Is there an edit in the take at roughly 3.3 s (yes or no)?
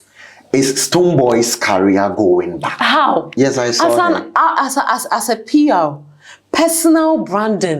yes